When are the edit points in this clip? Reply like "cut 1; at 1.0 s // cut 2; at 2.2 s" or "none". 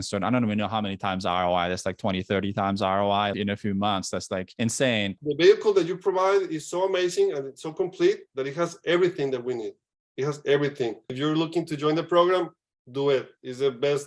cut 1; at 5.1 s // cut 2; at 11.1 s